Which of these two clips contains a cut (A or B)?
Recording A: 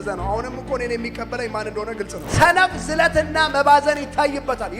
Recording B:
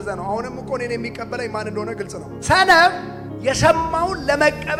A